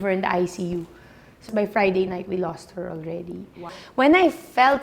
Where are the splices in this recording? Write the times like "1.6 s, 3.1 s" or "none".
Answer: 1.5 s, 3.8 s